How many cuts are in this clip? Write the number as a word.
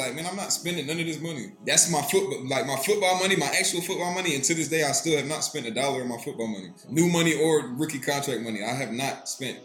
two